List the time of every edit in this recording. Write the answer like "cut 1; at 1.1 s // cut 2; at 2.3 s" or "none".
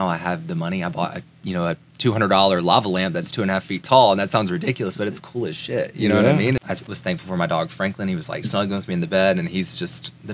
cut 1; at 6.6 s